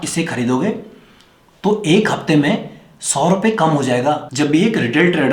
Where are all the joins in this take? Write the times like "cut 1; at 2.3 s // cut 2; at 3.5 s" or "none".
cut 1; at 4.3 s